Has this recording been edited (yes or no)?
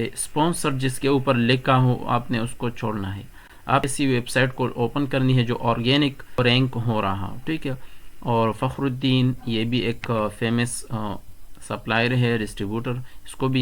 yes